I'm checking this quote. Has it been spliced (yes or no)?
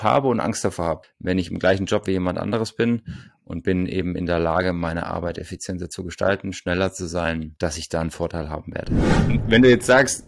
yes